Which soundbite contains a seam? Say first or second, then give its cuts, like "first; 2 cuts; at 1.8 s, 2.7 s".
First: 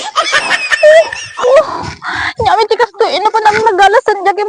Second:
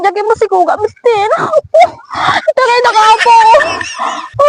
first; 1 cut; at 1.2 s